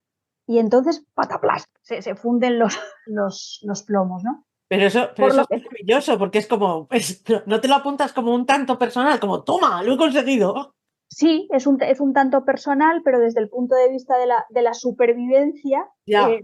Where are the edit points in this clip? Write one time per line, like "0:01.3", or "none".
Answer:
0:03.0